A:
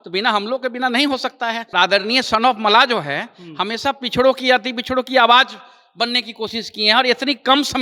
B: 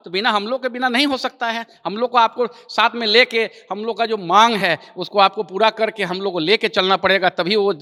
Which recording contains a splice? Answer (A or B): A